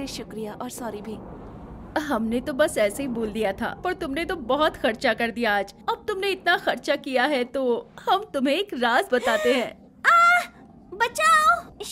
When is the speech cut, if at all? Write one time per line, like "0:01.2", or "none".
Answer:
none